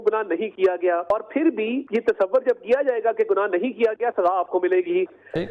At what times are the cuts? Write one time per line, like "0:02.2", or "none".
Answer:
0:01.4